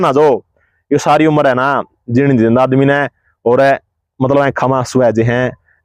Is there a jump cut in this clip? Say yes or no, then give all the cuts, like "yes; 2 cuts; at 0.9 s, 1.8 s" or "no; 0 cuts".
no; 0 cuts